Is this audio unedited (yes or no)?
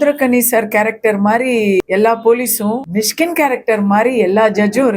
no